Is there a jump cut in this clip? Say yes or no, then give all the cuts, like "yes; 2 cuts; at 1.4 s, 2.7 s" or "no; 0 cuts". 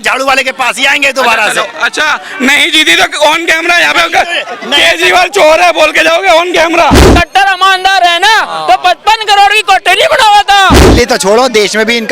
yes; 2 cuts; at 7.0 s, 10.8 s